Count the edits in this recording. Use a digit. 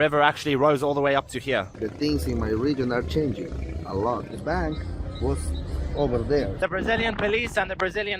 3